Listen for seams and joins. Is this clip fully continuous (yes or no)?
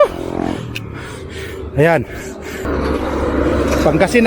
no